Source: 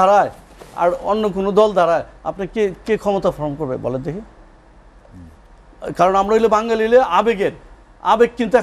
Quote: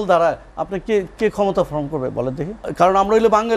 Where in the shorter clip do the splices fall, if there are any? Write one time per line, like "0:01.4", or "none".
0:02.6